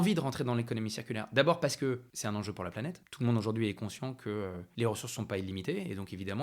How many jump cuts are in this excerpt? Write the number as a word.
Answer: three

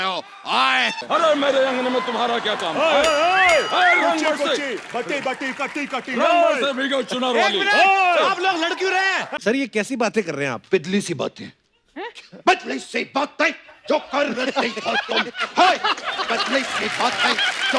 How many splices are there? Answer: two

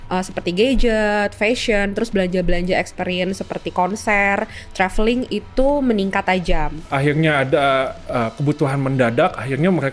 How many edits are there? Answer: one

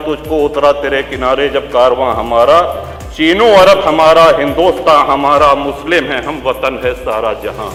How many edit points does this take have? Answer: zero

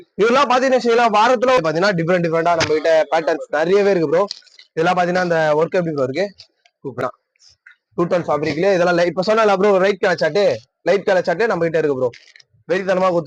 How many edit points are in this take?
two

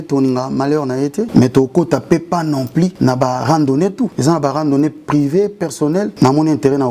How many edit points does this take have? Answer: four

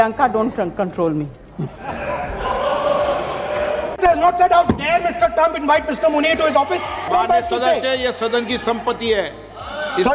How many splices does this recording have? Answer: two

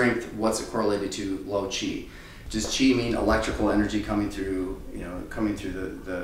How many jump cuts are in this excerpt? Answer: one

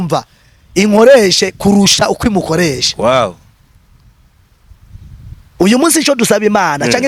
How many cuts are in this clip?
zero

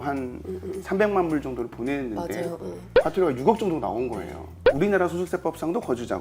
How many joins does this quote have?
two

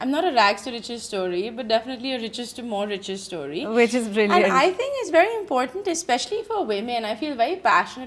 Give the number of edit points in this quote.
zero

